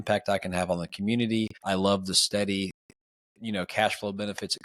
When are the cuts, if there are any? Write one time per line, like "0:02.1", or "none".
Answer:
0:01.6